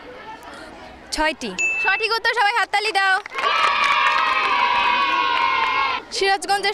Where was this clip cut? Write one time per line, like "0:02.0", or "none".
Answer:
0:03.3
0:04.8
0:05.9